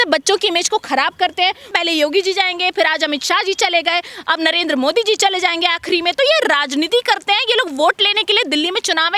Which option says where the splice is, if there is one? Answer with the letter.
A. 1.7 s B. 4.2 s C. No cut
A